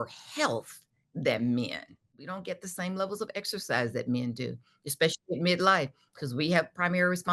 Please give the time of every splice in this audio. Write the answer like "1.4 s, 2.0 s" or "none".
2.3 s